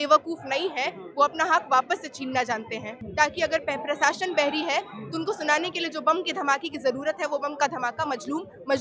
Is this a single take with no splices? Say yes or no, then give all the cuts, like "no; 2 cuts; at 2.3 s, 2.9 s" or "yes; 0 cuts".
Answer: no; 1 cut; at 3.0 s